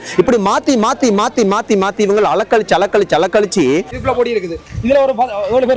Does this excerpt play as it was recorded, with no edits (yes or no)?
no